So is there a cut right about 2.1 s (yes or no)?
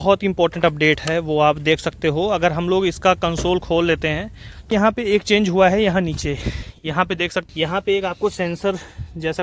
no